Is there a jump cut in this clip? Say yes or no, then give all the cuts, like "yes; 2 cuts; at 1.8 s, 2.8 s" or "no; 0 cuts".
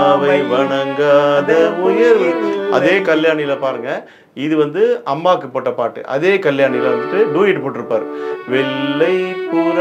no; 0 cuts